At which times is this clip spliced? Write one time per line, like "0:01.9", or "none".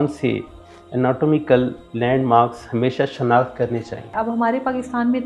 0:04.1